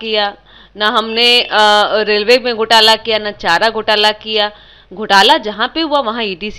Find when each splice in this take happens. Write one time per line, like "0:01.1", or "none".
none